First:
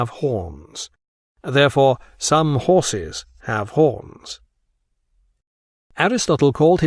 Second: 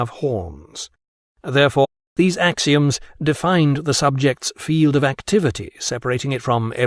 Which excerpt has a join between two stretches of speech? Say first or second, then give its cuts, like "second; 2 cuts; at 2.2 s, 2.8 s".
first; 1 cut; at 1.9 s